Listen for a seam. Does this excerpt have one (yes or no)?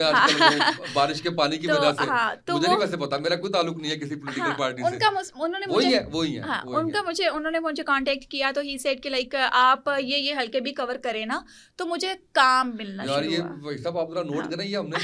no